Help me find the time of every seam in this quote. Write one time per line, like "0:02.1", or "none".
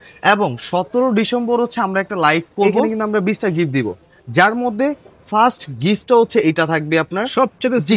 0:02.9